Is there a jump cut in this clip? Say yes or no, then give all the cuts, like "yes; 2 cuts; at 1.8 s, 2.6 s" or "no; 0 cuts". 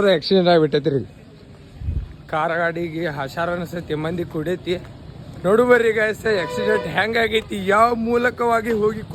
no; 0 cuts